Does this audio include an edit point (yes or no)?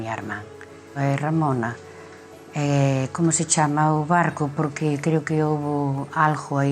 yes